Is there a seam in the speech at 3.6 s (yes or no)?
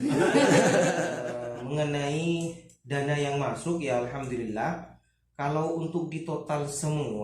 no